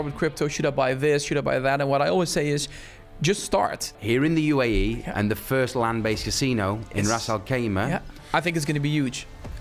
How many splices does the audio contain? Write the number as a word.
two